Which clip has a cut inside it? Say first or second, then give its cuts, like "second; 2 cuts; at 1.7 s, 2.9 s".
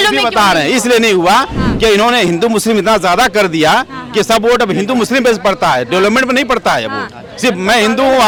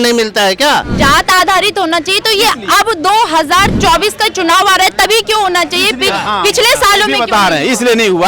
second; 2 cuts; at 0.9 s, 3.8 s